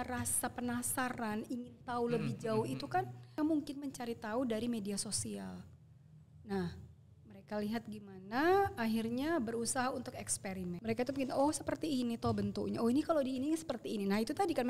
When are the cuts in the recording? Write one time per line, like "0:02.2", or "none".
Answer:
0:03.3
0:10.8